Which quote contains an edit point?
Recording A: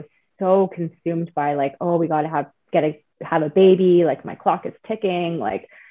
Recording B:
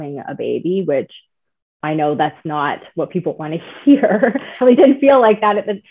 B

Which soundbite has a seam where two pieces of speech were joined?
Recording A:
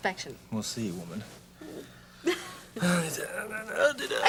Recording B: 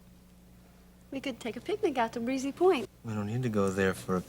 B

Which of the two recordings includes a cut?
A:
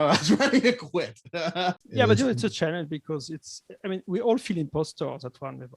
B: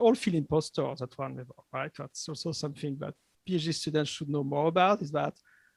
A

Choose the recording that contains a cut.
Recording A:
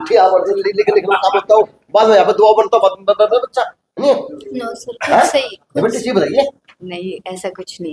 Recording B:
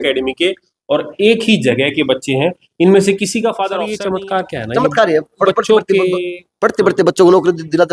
B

